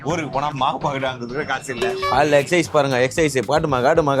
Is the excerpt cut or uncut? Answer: cut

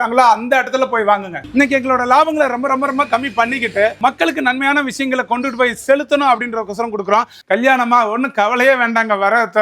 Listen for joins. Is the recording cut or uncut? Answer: cut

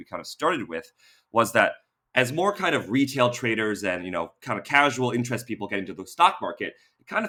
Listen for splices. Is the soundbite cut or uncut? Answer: uncut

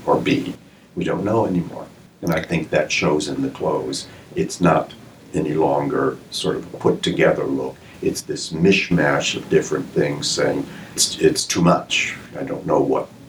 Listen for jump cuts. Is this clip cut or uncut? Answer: cut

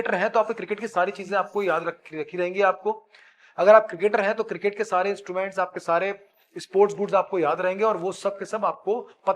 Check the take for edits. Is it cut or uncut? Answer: uncut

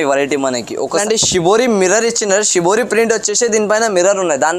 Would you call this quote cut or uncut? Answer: cut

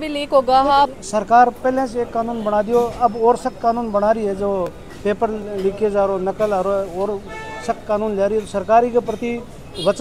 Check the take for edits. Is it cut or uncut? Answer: uncut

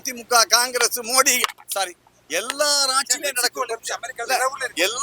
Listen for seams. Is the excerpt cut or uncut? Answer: uncut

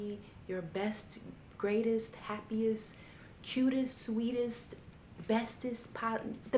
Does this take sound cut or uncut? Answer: uncut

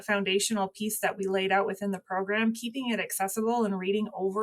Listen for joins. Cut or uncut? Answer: uncut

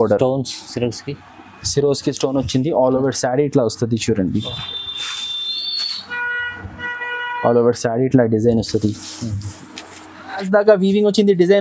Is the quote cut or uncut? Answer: cut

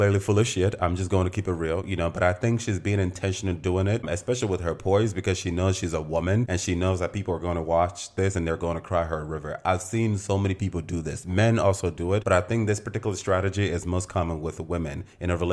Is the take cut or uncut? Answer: uncut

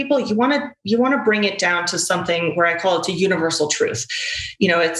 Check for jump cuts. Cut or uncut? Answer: uncut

